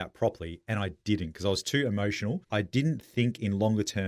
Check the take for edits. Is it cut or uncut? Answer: cut